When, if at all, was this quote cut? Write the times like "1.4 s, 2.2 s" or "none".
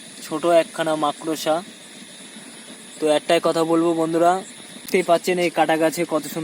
4.9 s